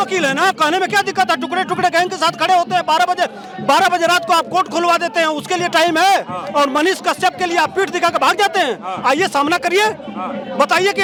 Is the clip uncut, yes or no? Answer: yes